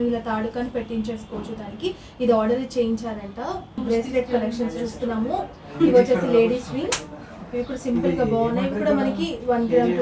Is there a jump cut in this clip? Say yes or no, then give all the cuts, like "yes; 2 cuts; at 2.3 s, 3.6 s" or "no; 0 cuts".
no; 0 cuts